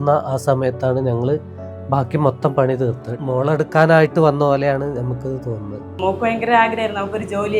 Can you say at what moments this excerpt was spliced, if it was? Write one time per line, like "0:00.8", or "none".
0:03.1
0:06.0